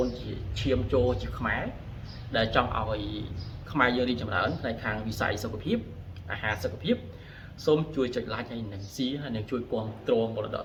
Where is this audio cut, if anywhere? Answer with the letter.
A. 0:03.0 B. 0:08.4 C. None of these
C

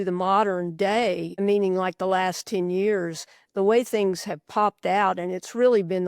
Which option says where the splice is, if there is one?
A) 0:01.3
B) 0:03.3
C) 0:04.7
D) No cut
A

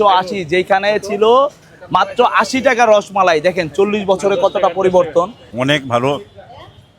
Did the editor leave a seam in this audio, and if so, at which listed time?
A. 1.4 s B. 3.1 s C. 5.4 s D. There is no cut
C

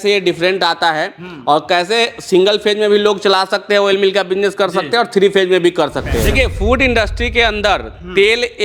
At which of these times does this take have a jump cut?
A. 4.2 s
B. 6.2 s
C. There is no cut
B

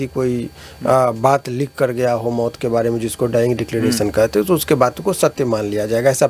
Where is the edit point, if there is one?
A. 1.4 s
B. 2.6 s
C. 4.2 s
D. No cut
D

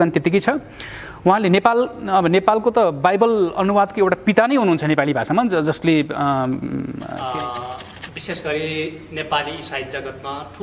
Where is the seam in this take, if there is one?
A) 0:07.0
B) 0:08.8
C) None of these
A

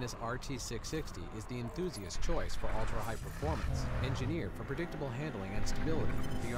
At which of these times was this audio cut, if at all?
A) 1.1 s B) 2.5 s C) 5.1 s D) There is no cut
D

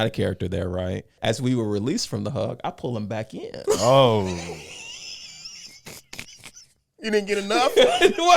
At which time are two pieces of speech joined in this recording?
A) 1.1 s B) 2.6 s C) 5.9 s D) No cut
A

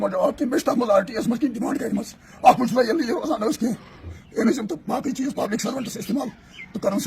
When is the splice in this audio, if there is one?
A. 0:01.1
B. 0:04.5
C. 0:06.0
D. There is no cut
B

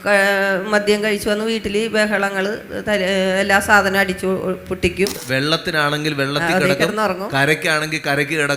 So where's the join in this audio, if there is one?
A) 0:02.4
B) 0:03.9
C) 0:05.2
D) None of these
C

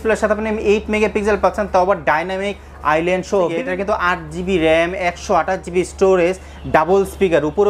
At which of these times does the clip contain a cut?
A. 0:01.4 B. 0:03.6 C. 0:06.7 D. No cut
B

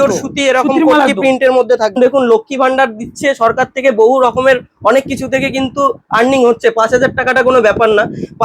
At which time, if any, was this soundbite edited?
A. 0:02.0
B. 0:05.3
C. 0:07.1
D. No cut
A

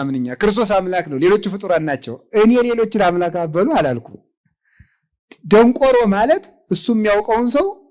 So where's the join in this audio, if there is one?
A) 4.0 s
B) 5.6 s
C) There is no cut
C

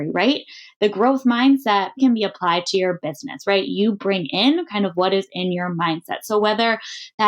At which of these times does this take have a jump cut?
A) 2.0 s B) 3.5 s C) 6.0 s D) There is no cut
A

